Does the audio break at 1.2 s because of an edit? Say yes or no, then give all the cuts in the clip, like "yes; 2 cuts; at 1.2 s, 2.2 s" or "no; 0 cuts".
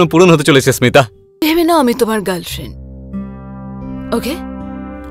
yes; 1 cut; at 1.2 s